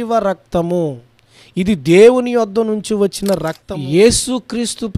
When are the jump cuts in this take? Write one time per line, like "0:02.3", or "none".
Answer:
0:03.6